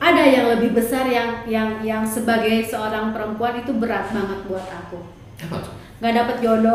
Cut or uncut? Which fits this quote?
uncut